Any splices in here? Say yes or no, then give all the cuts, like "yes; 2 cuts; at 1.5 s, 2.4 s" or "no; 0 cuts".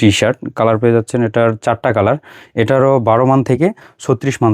no; 0 cuts